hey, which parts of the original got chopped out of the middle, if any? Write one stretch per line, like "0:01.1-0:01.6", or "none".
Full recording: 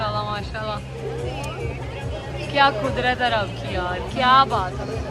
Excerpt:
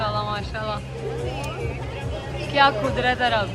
none